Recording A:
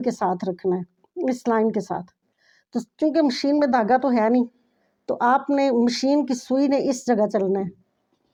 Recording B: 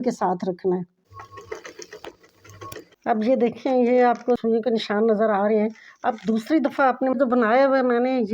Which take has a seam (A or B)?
B